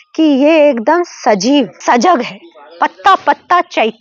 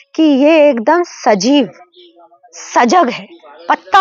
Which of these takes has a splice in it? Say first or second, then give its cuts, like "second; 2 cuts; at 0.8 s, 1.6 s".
first; 1 cut; at 1.8 s